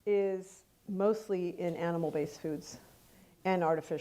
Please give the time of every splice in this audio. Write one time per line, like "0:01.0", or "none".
none